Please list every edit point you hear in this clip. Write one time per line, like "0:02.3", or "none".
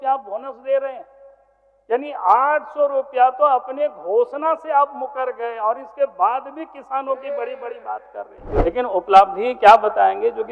0:08.4